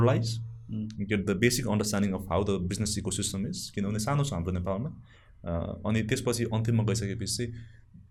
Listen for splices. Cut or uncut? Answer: uncut